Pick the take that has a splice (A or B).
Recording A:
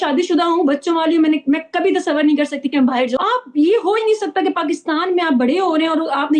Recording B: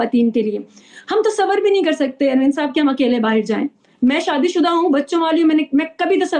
A